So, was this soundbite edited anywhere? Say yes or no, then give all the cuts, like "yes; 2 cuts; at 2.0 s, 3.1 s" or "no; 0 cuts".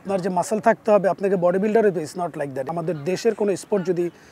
yes; 1 cut; at 2.7 s